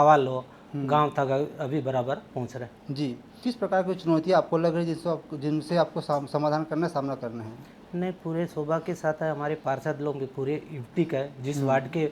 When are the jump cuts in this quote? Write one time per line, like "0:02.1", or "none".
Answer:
0:03.4